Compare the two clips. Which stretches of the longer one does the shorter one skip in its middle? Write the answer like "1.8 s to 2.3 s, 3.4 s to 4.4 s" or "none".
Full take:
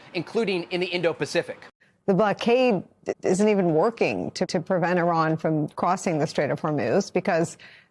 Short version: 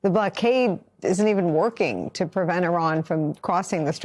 2.9 s to 3.1 s, 4.4 s to 4.6 s